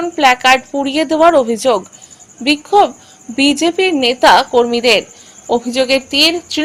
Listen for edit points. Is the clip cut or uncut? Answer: uncut